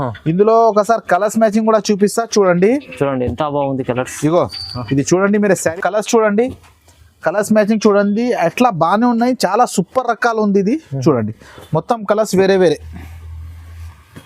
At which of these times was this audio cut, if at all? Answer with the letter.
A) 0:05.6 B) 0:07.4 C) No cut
A